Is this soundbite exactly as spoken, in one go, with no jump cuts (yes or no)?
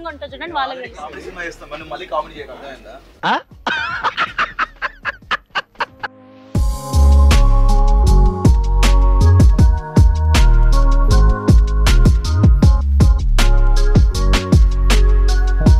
yes